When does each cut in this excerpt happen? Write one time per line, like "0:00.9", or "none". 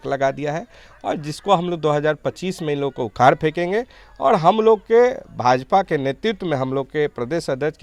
none